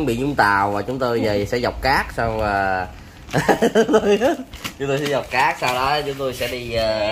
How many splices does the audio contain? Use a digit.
0